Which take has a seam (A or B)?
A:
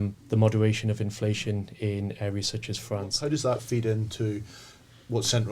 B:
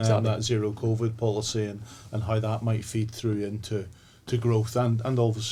A